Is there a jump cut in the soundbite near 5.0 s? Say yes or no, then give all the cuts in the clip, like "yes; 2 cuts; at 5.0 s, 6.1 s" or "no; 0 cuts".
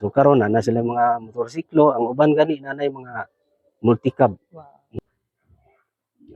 yes; 1 cut; at 5.0 s